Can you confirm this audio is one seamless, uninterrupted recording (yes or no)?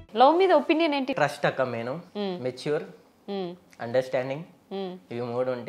no